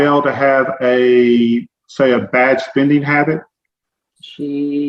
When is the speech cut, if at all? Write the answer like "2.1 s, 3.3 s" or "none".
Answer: none